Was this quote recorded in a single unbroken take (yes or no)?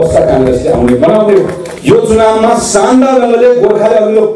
no